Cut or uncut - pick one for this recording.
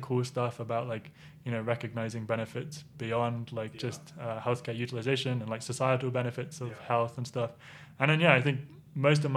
uncut